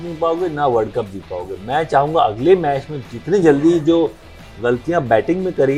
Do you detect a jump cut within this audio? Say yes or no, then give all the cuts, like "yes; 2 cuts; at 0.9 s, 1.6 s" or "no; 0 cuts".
no; 0 cuts